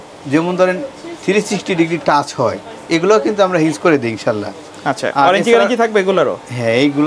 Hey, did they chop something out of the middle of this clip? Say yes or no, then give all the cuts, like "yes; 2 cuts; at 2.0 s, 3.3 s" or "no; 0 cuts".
no; 0 cuts